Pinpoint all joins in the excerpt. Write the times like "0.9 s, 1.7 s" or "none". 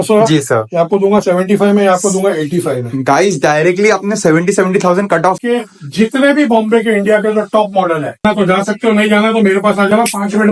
5.4 s, 8.2 s